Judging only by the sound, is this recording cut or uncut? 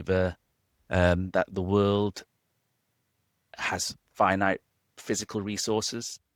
uncut